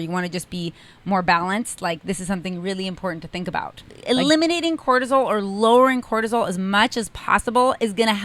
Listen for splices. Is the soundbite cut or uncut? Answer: cut